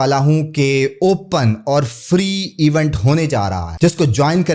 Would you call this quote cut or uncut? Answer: cut